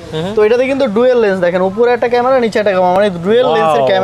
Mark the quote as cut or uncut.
uncut